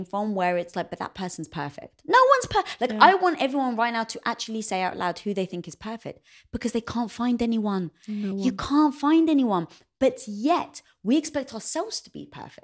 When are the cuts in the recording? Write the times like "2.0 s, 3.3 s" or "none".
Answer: none